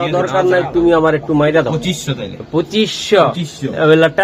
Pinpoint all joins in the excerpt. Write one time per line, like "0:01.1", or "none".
none